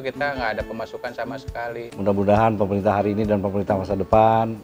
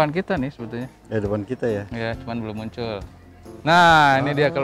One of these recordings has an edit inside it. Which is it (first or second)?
first